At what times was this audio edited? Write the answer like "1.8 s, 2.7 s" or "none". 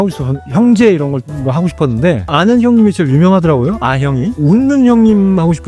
1.3 s, 2.3 s, 4.3 s